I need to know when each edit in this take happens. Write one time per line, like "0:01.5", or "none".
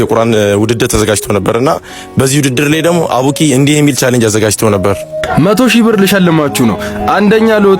none